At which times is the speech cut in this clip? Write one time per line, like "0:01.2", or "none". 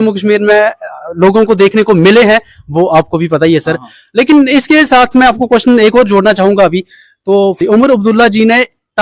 none